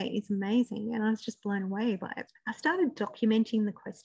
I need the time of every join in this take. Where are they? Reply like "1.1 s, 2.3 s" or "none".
2.1 s